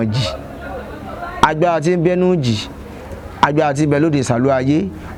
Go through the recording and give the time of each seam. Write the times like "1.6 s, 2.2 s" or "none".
none